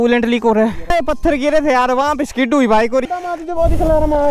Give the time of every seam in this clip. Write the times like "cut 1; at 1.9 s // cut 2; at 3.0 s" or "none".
cut 1; at 0.9 s // cut 2; at 3.1 s

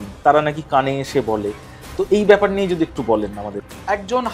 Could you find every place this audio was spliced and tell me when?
cut 1; at 3.4 s

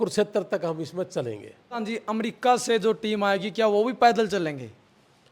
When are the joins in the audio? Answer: cut 1; at 1.7 s

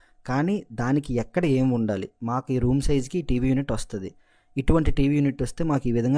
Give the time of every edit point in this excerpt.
none

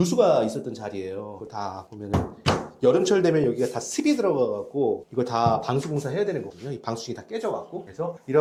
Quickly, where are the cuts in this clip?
none

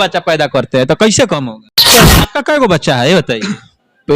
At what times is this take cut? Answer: cut 1; at 2.0 s

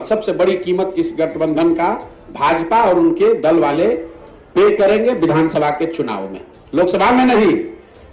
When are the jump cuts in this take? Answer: none

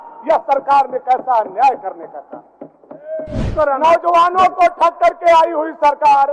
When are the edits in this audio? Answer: cut 1; at 3.5 s

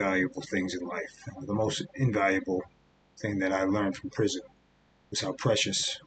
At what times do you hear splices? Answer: none

